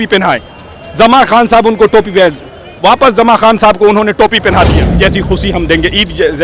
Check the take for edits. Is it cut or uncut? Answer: cut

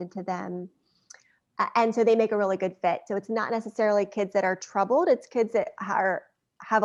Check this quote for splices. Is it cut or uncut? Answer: uncut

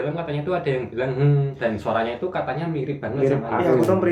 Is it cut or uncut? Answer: uncut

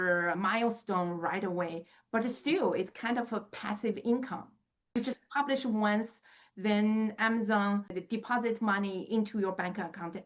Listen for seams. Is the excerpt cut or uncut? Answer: cut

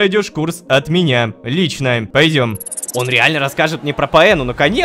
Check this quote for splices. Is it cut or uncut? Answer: cut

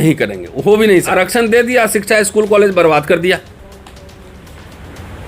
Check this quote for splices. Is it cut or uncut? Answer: cut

